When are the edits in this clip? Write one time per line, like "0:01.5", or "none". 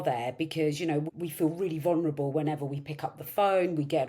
0:01.1